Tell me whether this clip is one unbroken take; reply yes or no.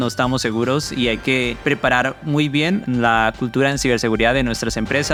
yes